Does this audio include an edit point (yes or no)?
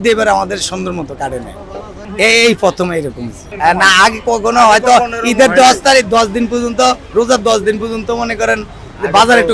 no